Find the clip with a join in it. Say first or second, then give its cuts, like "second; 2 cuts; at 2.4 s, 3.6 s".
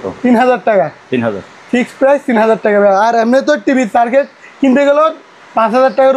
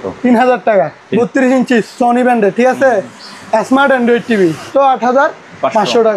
second; 2 cuts; at 1.0 s, 4.7 s